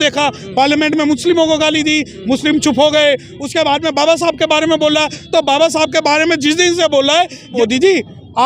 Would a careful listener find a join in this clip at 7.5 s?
yes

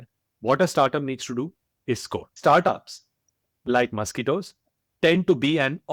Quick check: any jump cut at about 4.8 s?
no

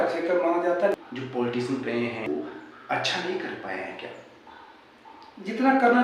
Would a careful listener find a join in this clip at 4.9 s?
no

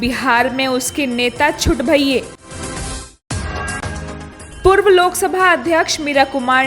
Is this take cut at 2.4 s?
yes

